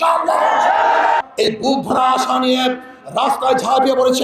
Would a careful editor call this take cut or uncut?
cut